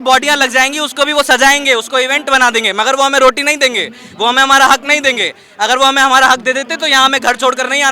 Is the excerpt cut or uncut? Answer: uncut